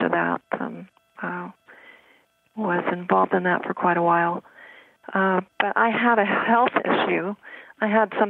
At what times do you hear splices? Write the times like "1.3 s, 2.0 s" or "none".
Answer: none